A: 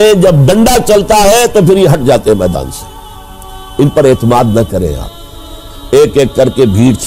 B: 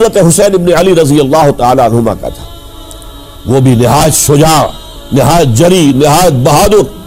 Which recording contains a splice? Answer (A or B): A